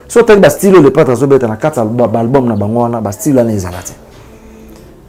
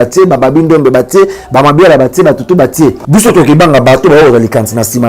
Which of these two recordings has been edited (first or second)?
second